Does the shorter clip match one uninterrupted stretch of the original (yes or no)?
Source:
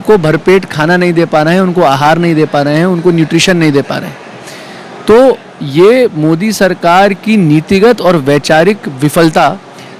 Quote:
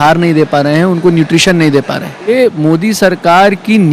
no